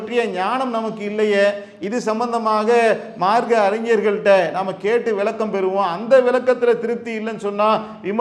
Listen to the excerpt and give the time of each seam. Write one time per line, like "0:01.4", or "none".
none